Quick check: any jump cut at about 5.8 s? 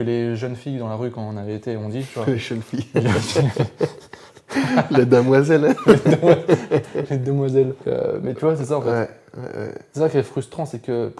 no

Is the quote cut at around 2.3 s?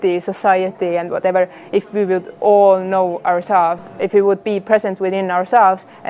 no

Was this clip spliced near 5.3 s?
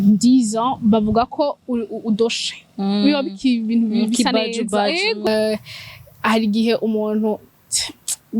yes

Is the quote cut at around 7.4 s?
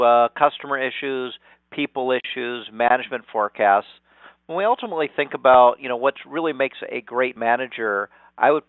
no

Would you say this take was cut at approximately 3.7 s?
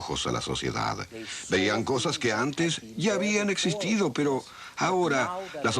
no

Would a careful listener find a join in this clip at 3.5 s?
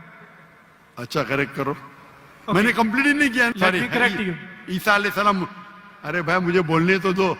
yes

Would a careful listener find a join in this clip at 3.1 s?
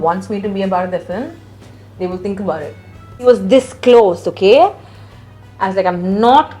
yes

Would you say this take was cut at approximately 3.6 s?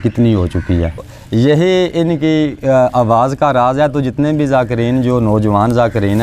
no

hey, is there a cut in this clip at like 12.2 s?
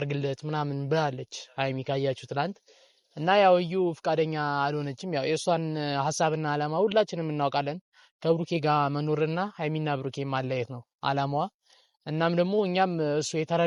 no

